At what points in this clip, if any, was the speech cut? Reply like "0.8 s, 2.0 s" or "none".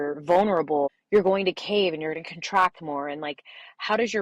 1.0 s